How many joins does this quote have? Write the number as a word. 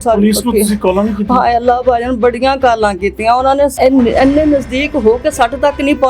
one